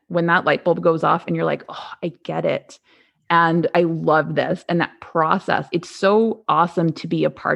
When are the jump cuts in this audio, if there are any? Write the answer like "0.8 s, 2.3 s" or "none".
3.7 s